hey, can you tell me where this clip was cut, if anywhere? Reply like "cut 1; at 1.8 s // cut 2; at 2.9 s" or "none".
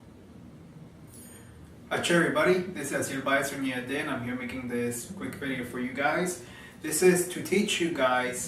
cut 1; at 3.9 s